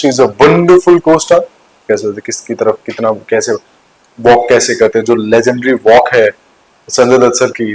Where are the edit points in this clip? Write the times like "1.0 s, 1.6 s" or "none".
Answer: 1.7 s